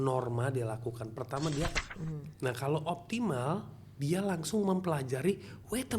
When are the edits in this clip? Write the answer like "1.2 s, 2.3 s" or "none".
1.7 s